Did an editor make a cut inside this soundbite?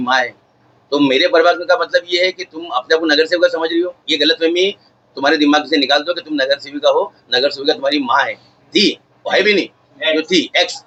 no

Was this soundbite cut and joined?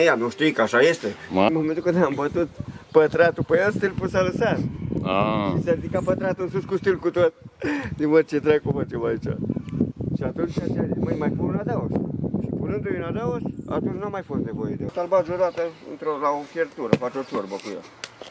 yes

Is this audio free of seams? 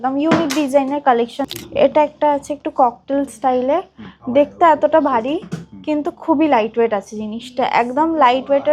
no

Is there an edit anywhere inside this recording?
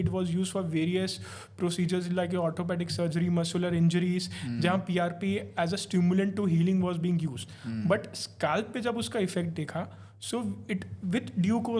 no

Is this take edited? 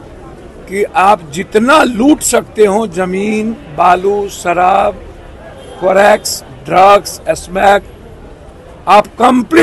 no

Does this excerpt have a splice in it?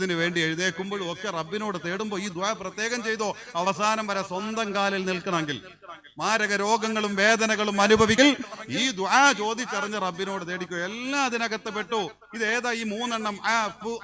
yes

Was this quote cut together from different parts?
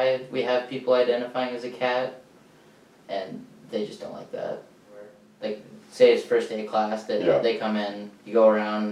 yes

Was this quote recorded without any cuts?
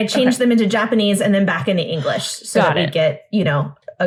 yes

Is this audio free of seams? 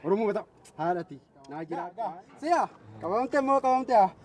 no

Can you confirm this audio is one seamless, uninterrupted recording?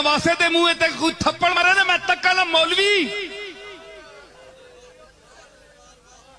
no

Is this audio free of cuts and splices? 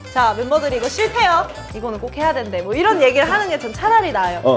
no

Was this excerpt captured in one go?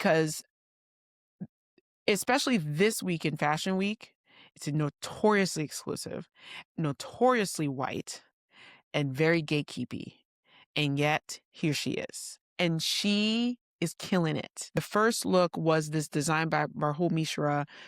no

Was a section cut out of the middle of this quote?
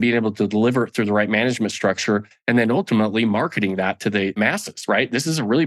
yes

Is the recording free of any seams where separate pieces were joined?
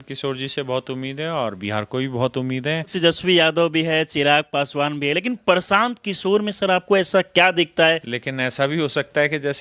no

